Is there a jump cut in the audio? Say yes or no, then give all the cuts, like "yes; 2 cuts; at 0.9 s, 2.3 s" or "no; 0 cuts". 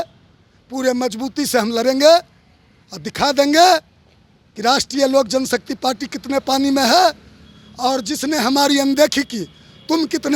no; 0 cuts